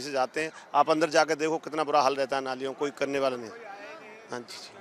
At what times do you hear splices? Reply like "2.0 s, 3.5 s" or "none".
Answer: none

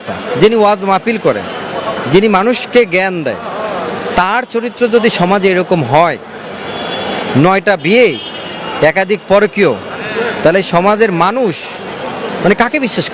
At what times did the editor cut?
none

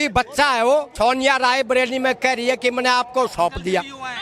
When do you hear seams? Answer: 0.9 s

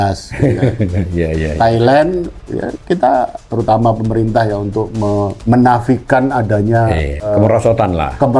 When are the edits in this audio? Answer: 3.4 s, 5.4 s, 7.3 s

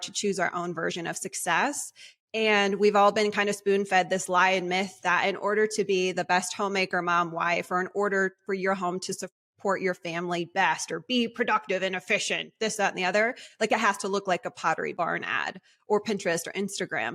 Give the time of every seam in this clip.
14.9 s

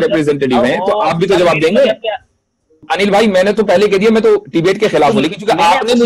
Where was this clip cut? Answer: 2.8 s

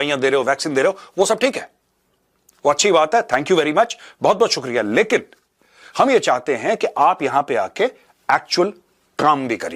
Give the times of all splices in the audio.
none

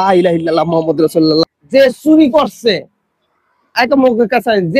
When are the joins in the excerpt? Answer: 1.5 s

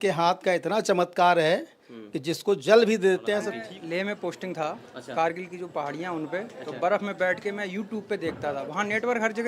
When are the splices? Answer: 3.5 s

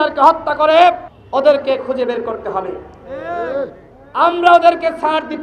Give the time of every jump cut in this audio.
1.1 s

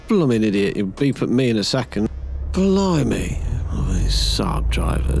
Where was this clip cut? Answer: 2.1 s

